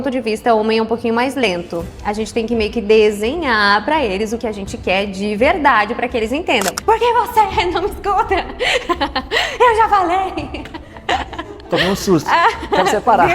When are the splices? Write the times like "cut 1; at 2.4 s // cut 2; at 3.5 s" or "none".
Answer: cut 1; at 6.8 s